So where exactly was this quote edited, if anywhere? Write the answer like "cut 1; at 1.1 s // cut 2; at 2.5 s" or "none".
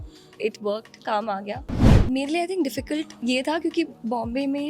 cut 1; at 2.0 s